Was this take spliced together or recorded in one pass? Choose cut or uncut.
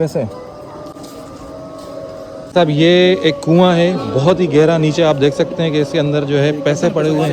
uncut